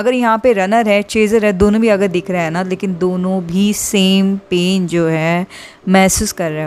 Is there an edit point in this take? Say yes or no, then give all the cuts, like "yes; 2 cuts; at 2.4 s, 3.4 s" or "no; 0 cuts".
no; 0 cuts